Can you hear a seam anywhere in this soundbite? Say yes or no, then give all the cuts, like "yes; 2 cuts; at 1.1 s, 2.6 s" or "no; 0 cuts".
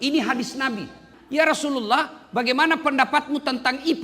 yes; 1 cut; at 1.1 s